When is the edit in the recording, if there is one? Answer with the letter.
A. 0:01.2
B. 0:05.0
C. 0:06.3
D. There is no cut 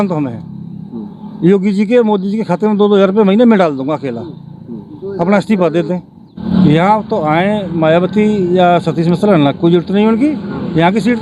C